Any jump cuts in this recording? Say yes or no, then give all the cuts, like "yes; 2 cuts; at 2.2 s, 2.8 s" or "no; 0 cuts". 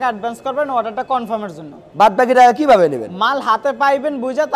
no; 0 cuts